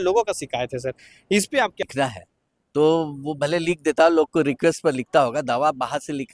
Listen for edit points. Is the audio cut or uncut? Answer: cut